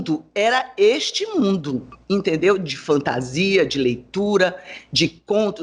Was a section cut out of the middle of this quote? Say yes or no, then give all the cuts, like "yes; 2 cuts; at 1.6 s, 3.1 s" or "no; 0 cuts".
no; 0 cuts